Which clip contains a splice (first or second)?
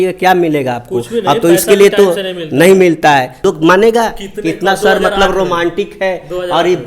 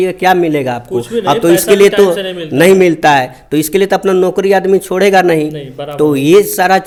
first